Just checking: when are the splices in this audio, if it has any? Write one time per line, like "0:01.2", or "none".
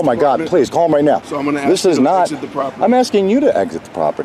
0:01.3